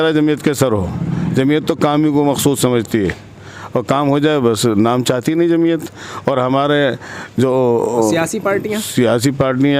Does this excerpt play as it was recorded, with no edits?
yes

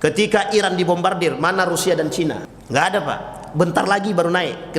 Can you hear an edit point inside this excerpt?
yes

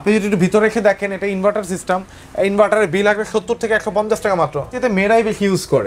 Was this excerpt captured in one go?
no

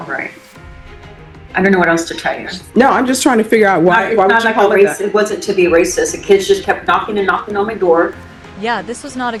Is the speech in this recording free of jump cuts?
yes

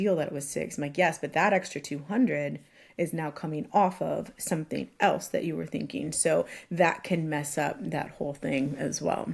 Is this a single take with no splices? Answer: yes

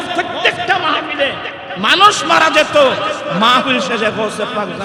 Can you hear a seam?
no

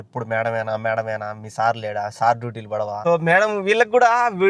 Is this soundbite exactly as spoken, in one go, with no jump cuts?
no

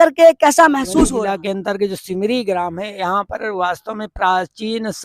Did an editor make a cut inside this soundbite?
yes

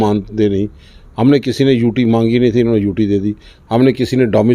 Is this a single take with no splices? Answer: yes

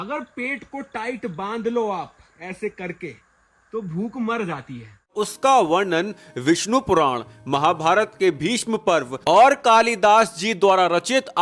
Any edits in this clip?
yes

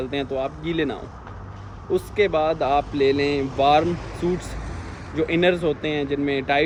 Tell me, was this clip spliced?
no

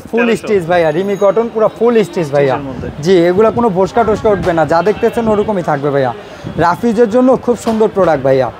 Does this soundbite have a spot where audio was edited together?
no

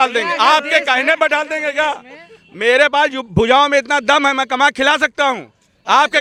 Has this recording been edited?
no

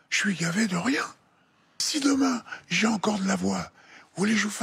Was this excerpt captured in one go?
no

